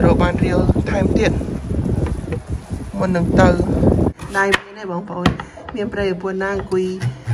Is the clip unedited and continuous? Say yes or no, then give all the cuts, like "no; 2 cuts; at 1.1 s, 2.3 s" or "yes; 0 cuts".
no; 1 cut; at 4.2 s